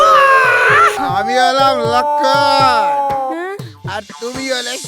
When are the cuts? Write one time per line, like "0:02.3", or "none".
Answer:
0:00.9